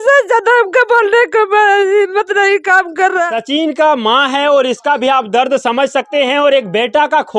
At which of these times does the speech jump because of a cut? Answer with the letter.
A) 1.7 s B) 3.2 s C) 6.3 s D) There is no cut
B